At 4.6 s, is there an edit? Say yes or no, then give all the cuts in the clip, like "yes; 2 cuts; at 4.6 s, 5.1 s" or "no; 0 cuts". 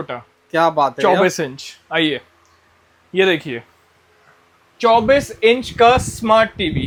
no; 0 cuts